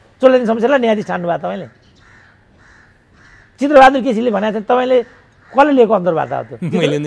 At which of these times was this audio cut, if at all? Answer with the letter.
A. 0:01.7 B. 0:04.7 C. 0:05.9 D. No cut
D